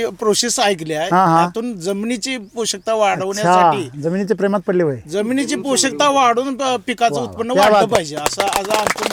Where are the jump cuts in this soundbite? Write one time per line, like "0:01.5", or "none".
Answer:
none